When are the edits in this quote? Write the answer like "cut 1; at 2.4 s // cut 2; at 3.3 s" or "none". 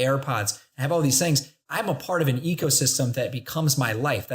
cut 1; at 1.6 s